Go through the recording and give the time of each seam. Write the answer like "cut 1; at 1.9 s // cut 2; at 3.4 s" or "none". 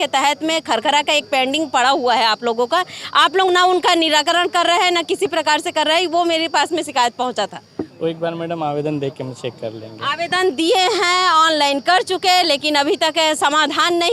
none